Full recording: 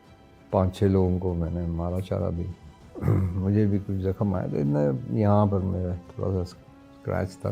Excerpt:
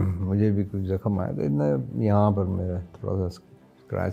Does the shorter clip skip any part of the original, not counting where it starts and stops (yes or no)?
no